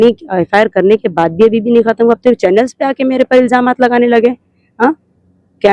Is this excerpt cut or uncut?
uncut